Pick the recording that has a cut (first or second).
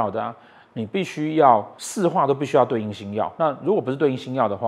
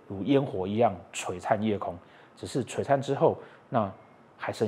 first